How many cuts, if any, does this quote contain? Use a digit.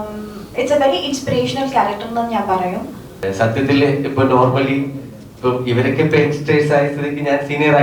1